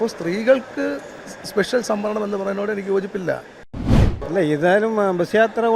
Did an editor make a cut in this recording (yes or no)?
yes